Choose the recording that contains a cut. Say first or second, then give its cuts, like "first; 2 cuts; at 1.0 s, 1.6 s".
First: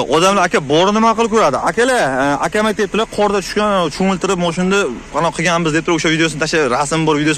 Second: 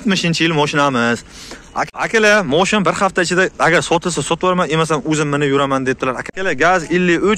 second; 2 cuts; at 1.7 s, 6.3 s